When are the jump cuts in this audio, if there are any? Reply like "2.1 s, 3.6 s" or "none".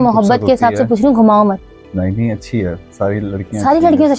1.8 s

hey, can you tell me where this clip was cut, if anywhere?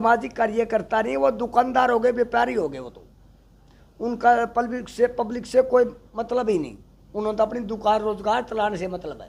none

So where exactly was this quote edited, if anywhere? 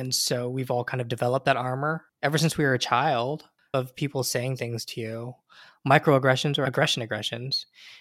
2.1 s, 3.7 s, 6.6 s

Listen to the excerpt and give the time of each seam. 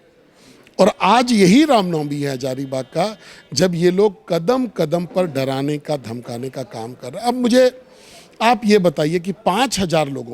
none

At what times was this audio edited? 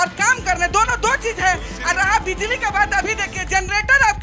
none

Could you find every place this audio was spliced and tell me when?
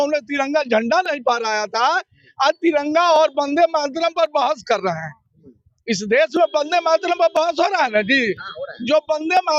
none

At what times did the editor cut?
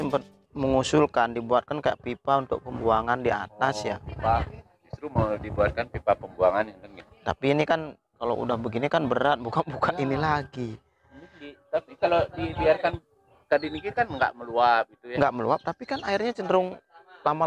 none

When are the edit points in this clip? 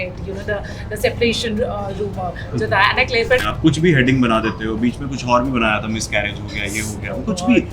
3.5 s

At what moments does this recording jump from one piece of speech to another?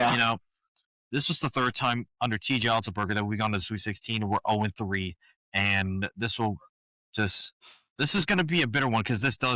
none

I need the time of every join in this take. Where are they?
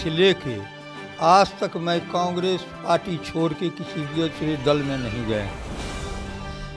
none

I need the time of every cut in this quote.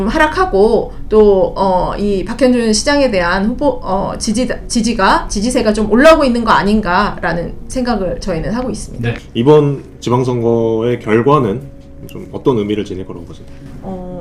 none

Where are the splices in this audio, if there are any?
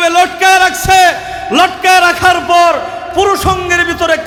none

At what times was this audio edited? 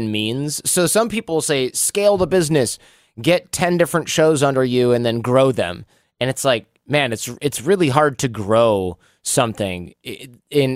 none

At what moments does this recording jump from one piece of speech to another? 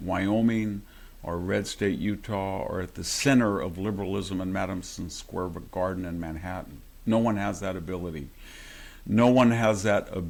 none

